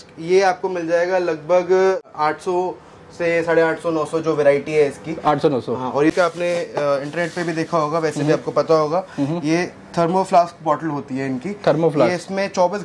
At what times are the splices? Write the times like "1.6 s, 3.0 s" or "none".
2.1 s, 6.1 s